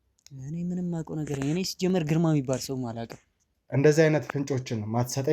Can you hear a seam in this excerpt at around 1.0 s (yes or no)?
no